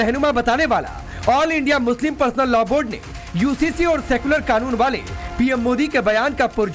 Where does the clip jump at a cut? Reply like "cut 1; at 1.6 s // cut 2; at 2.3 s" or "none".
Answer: none